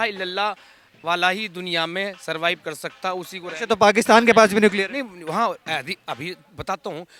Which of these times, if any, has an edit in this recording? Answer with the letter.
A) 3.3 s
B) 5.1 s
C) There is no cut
C